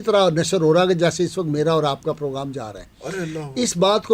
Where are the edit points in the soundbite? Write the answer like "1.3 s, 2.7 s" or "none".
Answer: none